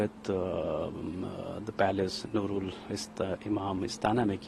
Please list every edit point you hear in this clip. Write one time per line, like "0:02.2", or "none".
none

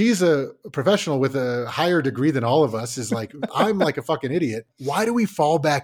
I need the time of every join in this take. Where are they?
0:03.5
0:04.7

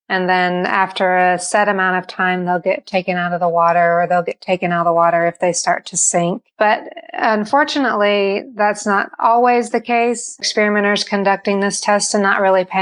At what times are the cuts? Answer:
0:06.5
0:10.5

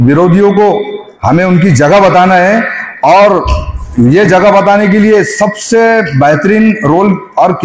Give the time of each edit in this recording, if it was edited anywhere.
none

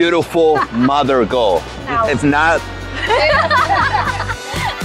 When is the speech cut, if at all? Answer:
0:01.8
0:02.9

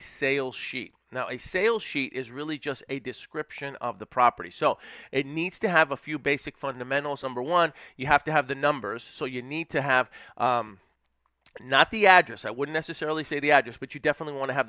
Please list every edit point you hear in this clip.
0:07.2

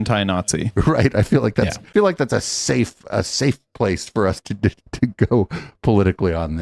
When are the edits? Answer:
none

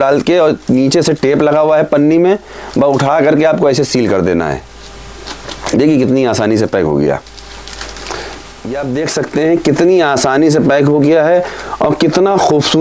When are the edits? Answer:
0:08.6

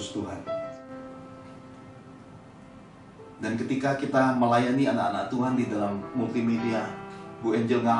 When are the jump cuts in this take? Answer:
0:00.9

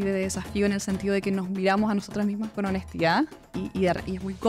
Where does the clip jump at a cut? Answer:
0:03.6

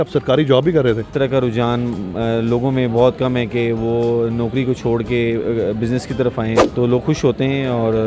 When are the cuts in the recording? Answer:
0:01.1
0:06.7

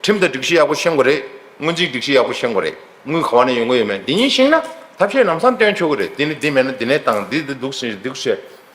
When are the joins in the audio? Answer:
none

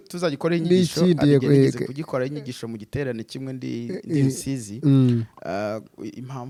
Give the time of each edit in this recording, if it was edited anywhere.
none

